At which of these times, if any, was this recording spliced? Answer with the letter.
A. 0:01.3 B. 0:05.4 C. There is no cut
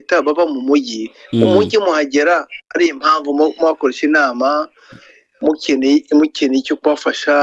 C